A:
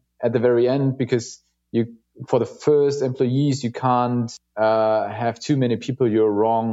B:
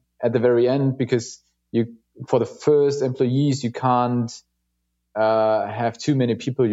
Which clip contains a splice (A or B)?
A